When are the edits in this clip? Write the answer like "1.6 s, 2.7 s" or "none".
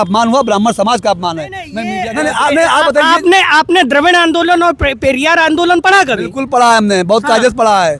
1.8 s